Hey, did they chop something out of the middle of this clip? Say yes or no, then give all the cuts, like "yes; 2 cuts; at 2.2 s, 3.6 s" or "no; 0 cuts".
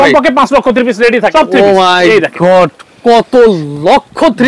yes; 1 cut; at 1.3 s